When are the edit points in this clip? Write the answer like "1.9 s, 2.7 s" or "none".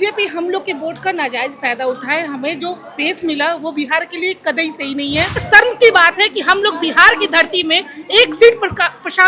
5.4 s